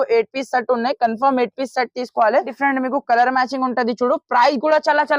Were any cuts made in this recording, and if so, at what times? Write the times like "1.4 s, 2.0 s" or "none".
2.5 s